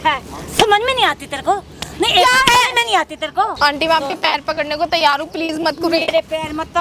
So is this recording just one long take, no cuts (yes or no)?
no